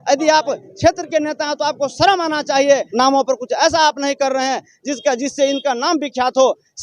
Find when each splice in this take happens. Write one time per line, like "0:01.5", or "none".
0:02.9

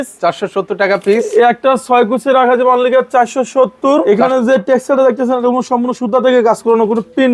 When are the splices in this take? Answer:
0:04.0

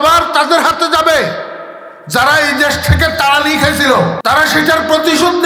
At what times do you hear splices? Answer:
0:04.2

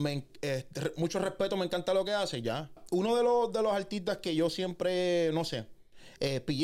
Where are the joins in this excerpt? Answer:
0:02.8

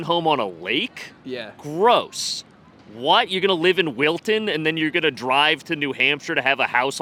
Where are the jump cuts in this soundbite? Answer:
none

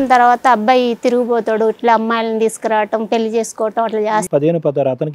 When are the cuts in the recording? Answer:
0:04.2

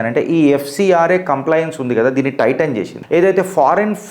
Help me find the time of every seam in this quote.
0:02.9

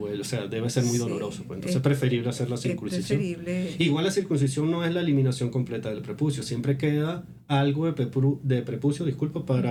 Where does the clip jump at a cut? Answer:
none

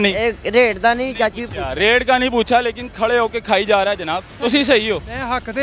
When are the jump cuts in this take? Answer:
0:04.4

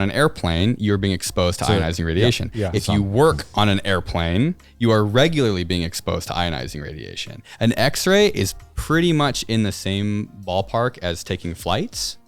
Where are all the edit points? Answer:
none

